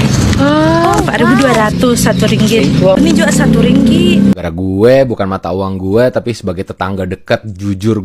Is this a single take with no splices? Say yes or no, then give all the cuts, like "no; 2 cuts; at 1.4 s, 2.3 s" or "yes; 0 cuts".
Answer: no; 1 cut; at 4.3 s